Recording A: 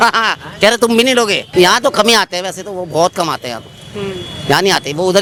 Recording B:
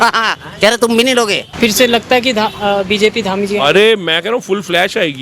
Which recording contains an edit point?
B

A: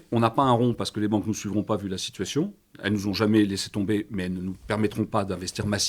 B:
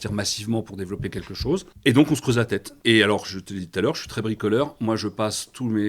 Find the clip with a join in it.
B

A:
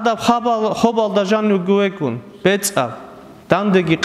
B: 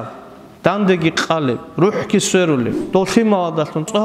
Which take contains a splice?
B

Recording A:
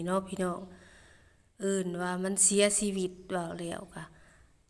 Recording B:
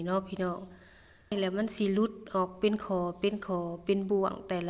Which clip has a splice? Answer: B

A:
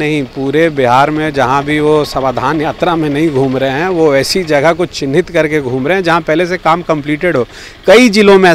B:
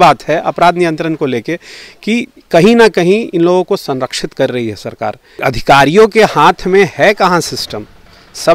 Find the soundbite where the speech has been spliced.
B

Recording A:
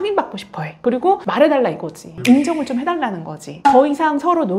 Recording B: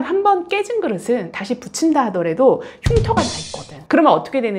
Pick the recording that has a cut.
A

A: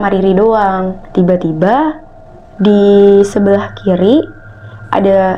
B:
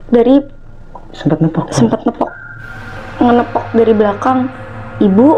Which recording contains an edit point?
A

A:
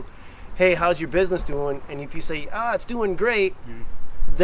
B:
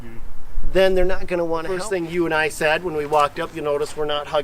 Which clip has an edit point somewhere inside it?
B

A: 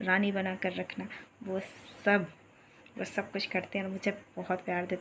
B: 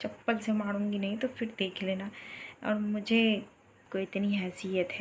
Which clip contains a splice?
B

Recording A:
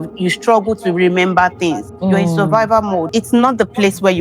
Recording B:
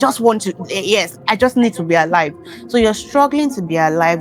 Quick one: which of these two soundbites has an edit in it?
A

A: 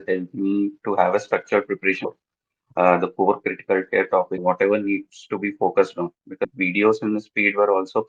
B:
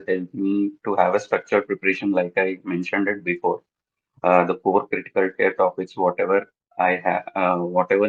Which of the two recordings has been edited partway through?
A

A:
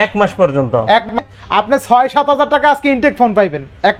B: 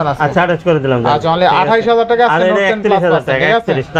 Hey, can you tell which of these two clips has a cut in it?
A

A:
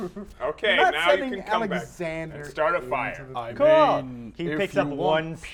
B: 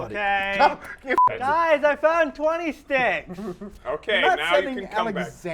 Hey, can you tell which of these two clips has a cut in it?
B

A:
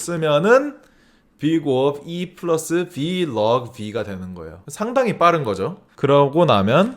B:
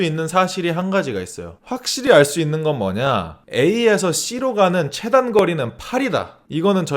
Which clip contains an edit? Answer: A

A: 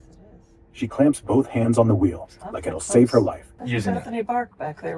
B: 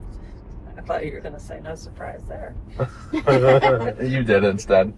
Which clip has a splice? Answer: A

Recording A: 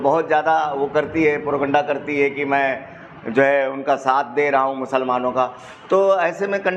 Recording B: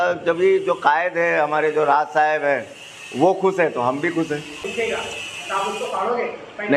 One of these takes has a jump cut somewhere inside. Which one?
B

